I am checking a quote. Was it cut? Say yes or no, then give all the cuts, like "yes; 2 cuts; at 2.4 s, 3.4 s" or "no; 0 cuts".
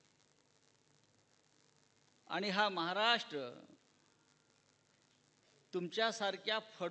no; 0 cuts